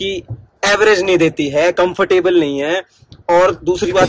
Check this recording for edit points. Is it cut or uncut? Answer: uncut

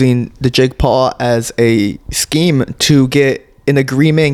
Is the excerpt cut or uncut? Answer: uncut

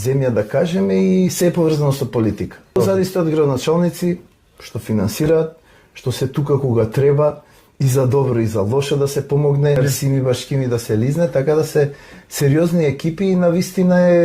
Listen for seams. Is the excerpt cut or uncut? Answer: cut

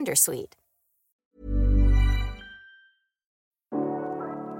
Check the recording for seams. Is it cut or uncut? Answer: cut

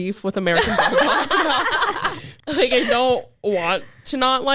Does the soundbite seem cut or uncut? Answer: cut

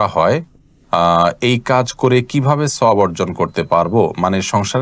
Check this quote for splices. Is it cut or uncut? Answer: uncut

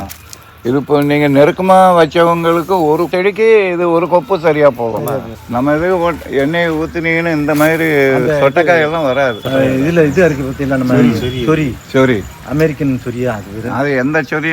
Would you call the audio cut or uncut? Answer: cut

